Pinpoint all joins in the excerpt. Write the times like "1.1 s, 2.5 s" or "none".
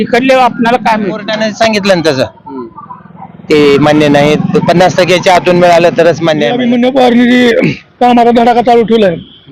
1.3 s, 6.6 s